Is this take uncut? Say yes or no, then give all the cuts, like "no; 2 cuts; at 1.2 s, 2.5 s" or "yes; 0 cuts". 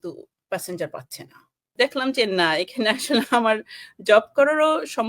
no; 1 cut; at 1.7 s